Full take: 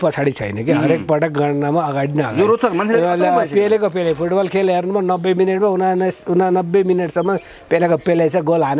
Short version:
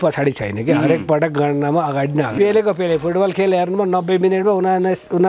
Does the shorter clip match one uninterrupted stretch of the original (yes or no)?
no